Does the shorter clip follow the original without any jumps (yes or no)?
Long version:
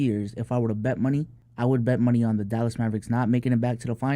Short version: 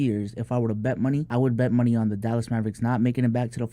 no